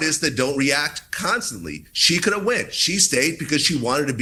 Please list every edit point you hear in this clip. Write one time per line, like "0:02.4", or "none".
none